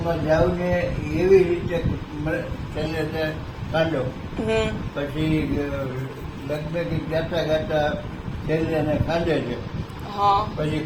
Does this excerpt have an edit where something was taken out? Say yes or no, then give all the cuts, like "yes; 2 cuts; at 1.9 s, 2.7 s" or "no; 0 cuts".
no; 0 cuts